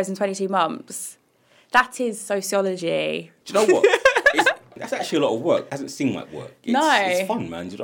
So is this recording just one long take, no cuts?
no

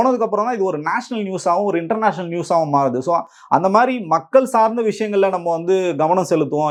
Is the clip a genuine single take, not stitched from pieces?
yes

